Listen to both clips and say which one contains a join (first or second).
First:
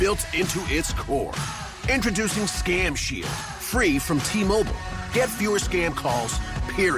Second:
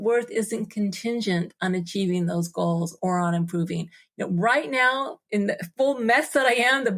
second